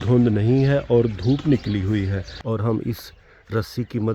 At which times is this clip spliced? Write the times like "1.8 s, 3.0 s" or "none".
2.3 s